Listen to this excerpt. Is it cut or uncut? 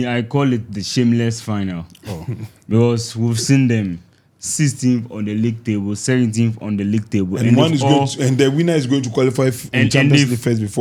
uncut